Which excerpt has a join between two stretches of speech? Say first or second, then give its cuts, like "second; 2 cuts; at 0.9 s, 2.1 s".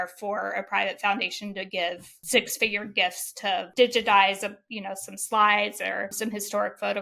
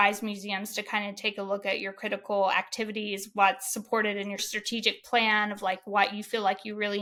first; 1 cut; at 6.1 s